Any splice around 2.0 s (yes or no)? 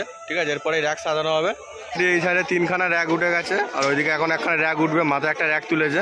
yes